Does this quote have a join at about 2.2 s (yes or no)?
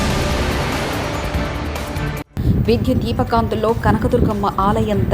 yes